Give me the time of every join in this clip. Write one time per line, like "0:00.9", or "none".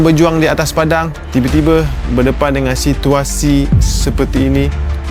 none